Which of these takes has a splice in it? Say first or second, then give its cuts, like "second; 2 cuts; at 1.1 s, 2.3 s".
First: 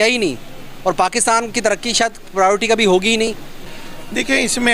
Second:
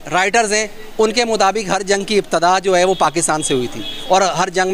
first; 1 cut; at 3.7 s